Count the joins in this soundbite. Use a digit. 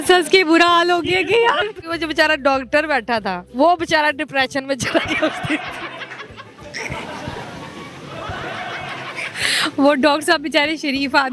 2